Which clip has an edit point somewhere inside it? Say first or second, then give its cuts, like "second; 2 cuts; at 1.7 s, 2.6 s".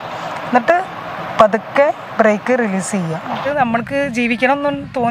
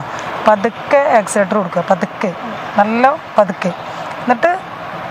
first; 1 cut; at 3.5 s